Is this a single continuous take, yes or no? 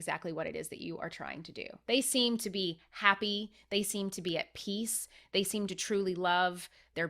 no